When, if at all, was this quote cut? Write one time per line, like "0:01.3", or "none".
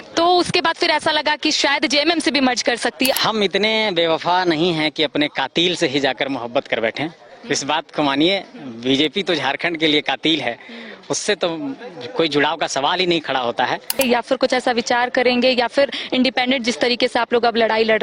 0:03.1
0:14.0